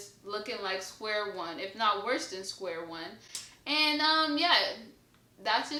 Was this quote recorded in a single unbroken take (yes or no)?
yes